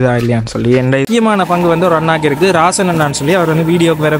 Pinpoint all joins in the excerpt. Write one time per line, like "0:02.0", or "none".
0:01.0